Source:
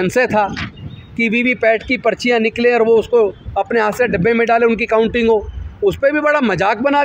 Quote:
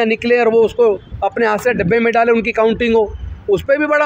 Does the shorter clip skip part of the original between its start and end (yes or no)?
no